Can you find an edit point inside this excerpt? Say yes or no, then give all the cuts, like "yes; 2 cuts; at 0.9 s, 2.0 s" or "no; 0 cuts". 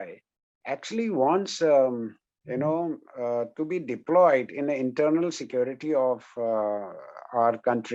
no; 0 cuts